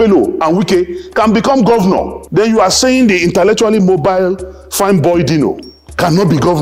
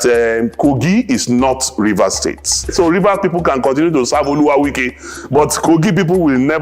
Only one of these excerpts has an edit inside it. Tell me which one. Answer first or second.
second